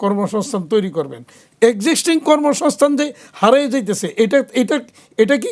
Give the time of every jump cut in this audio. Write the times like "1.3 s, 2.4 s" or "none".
none